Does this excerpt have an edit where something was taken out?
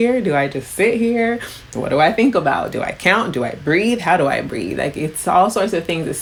no; 0 cuts

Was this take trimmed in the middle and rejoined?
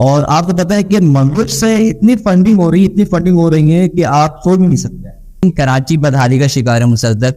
yes; 1 cut; at 5.4 s

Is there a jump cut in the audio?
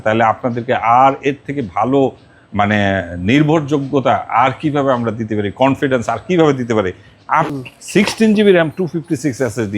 yes; 1 cut; at 7.5 s

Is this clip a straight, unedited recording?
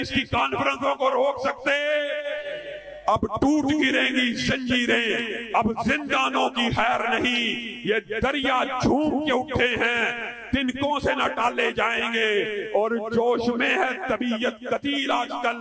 yes; 0 cuts

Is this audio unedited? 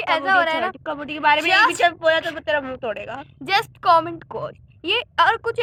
yes; 0 cuts

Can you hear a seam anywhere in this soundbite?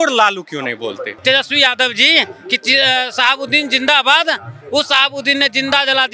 yes; 1 cut; at 1.1 s

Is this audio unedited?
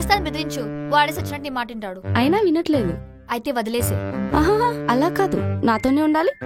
yes; 0 cuts

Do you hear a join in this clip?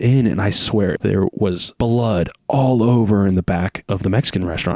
no; 0 cuts

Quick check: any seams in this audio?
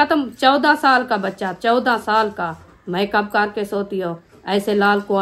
yes; 1 cut; at 2.7 s

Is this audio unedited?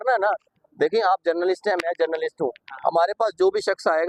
yes; 0 cuts

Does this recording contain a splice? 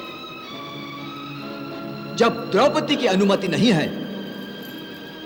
no; 0 cuts

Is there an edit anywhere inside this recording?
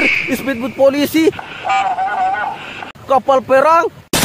yes; 1 cut; at 2.7 s

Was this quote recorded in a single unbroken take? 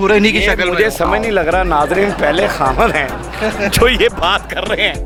yes; 0 cuts

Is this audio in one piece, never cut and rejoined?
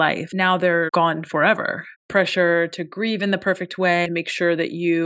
no; 3 cuts; at 0.7 s, 2.0 s, 4.0 s

